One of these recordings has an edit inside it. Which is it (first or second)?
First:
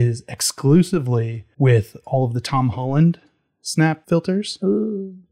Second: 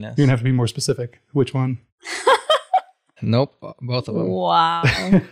first